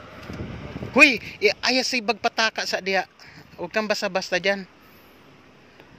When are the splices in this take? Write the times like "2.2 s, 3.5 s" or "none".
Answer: none

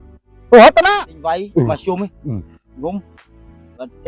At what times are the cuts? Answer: 0.9 s

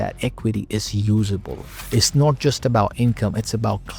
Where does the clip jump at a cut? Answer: 1.7 s

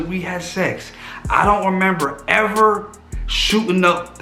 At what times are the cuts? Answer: none

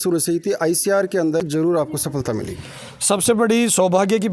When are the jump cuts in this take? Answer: 1.4 s

